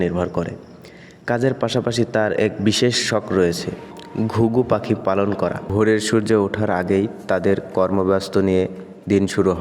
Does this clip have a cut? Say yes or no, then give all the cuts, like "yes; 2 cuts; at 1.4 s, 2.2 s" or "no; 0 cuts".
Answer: yes; 1 cut; at 5.6 s